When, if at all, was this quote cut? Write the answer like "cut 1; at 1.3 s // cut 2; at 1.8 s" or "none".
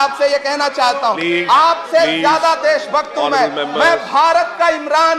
none